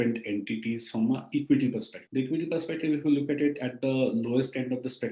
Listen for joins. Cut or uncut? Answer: cut